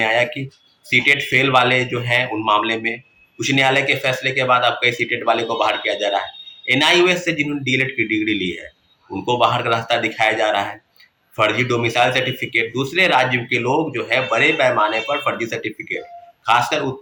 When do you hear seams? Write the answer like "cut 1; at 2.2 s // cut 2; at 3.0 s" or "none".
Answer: none